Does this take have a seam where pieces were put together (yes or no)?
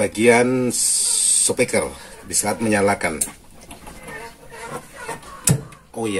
yes